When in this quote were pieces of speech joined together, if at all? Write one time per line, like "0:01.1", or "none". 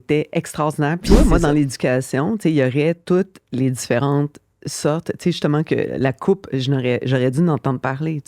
0:01.1